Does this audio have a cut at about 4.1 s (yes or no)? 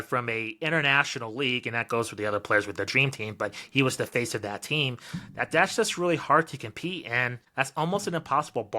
no